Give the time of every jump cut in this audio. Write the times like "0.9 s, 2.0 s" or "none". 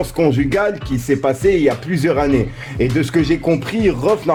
none